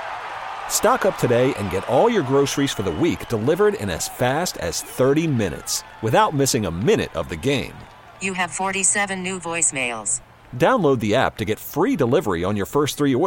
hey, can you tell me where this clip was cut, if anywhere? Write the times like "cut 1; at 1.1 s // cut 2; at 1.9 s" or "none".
none